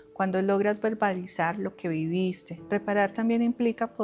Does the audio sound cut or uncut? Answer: cut